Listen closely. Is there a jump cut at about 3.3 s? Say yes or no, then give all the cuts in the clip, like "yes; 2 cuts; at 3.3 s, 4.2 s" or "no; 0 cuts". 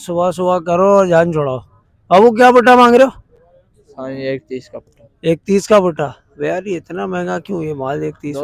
no; 0 cuts